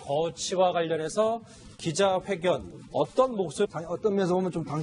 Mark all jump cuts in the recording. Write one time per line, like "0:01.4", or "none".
none